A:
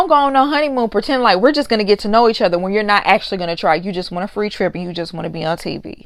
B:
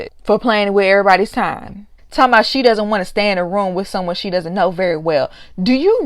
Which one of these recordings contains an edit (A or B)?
B